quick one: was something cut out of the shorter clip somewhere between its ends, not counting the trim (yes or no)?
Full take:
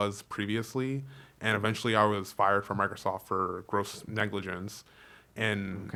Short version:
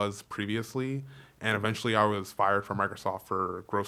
no